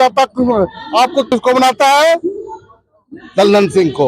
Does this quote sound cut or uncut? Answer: cut